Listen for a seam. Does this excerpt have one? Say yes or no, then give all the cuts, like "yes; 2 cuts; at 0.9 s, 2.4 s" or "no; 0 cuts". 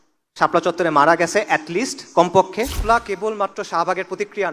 yes; 1 cut; at 2.8 s